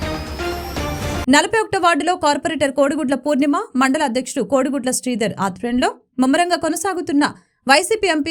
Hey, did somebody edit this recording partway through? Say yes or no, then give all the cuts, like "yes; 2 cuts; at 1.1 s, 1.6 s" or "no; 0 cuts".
yes; 1 cut; at 1.2 s